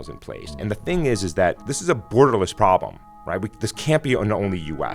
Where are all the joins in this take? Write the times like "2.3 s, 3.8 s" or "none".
1.7 s